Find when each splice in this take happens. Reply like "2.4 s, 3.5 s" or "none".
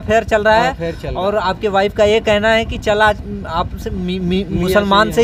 none